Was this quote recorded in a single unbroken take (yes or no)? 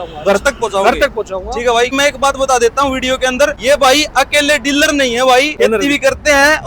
no